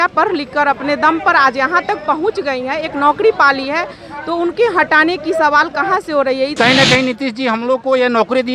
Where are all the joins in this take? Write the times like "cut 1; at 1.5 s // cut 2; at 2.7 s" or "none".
cut 1; at 6.5 s